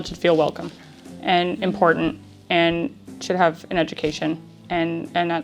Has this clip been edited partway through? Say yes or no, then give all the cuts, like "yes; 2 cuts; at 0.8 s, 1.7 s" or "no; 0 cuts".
no; 0 cuts